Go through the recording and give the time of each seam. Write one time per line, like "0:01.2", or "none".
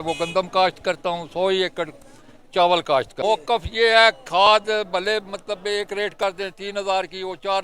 0:03.1